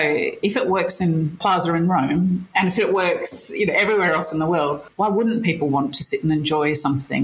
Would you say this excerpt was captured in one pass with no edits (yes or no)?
no